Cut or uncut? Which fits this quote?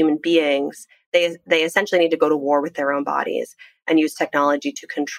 uncut